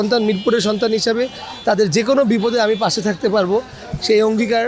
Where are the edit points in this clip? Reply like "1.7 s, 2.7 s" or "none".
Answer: none

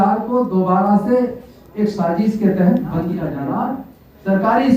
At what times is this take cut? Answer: 3.3 s

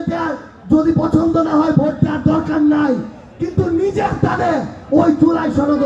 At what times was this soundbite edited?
none

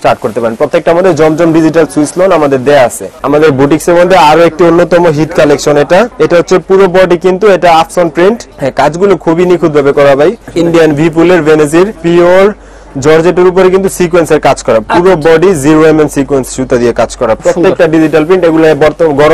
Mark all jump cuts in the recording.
3.1 s, 6.1 s, 8.5 s, 10.5 s, 12.0 s, 17.4 s

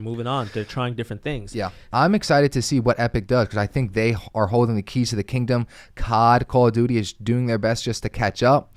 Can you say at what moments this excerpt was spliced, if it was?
1.9 s

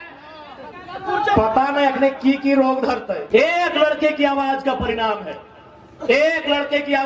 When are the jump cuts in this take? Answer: 3.2 s

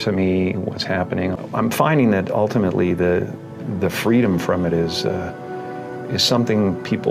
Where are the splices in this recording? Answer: none

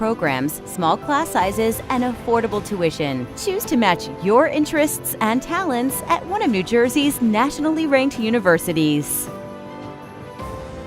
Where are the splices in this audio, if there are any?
9.1 s

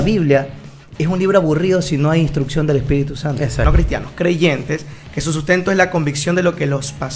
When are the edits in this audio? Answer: 3.7 s

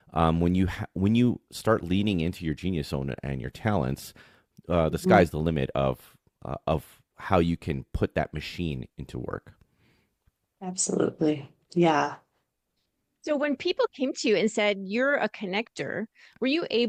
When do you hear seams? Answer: none

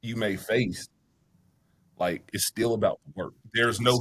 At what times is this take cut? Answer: none

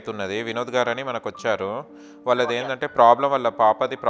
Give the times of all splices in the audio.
none

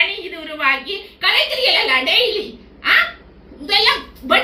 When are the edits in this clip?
none

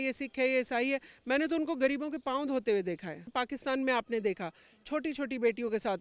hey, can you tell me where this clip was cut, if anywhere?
3.3 s

